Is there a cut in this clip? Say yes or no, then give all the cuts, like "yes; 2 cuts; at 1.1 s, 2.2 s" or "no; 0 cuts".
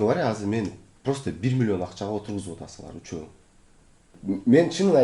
yes; 1 cut; at 4.1 s